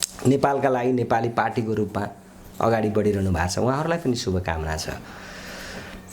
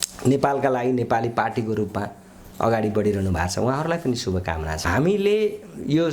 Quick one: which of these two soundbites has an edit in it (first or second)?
second